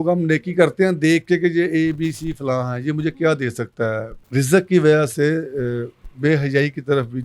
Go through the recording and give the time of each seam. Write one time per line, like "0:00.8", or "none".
0:04.1